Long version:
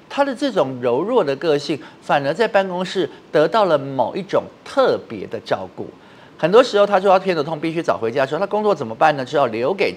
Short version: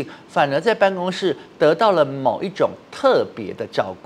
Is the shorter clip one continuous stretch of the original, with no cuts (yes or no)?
yes